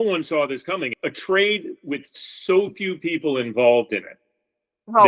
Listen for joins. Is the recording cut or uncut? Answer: cut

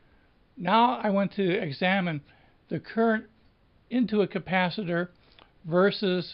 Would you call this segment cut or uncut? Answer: cut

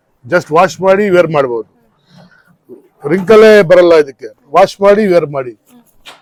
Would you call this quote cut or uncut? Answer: uncut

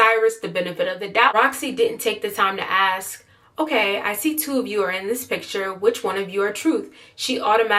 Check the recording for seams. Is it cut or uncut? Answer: cut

